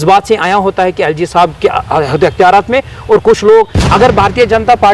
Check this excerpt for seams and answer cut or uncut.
cut